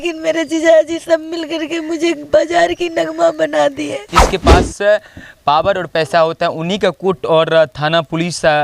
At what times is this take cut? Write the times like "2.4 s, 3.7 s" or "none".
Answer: 4.1 s

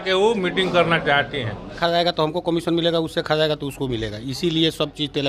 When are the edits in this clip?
1.7 s

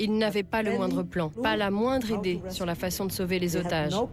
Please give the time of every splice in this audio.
1.3 s

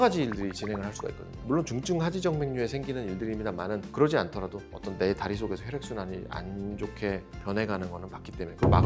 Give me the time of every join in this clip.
none

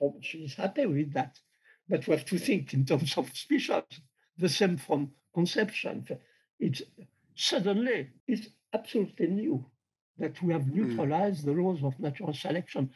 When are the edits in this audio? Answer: 8.1 s

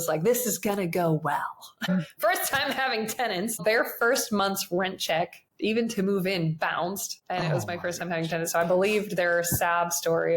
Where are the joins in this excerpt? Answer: 1.9 s, 3.6 s, 5.4 s, 7.1 s

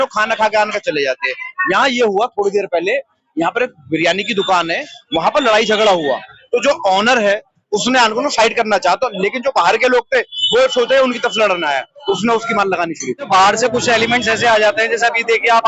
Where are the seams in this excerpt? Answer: 13.3 s

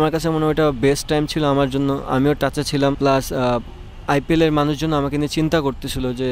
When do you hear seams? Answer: 3.0 s

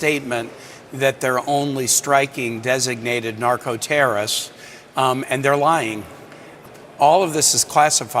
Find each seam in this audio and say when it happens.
6.5 s

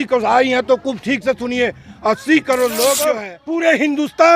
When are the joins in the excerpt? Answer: 3.3 s

